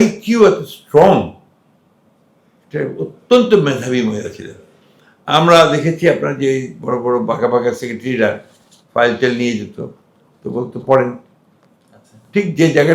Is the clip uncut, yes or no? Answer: yes